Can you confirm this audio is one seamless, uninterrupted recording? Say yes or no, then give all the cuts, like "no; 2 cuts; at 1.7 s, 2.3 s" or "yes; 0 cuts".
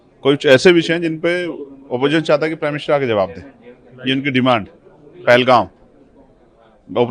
yes; 0 cuts